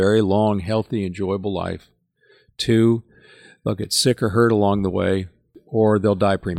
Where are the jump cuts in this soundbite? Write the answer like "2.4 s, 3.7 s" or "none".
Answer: 5.5 s